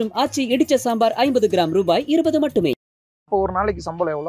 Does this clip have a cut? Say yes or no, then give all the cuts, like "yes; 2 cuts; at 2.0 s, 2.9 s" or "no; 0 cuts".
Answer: yes; 1 cut; at 3.3 s